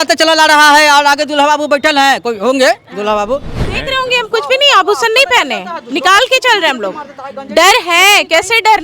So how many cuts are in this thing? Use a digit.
1